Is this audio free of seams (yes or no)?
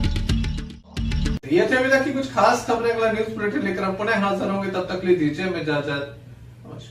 yes